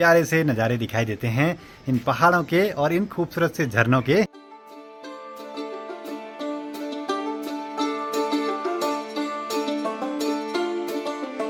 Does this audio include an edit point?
no; 0 cuts

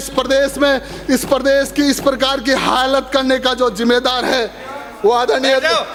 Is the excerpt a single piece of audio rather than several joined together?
yes; 0 cuts

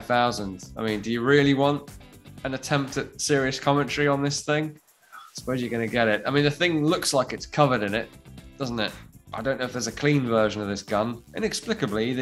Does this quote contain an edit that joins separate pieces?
no; 0 cuts

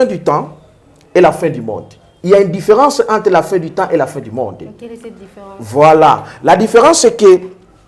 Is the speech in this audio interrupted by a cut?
no; 0 cuts

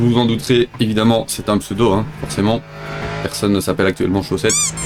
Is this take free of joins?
yes; 0 cuts

